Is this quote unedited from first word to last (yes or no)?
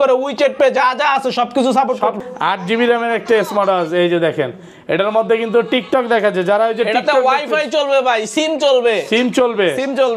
no